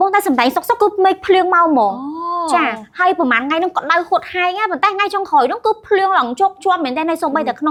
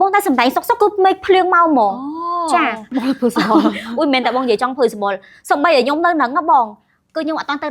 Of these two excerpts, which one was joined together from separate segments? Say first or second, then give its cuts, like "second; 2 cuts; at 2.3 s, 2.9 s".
second; 1 cut; at 2.9 s